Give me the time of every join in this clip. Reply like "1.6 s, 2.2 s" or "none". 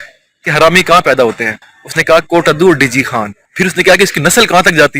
none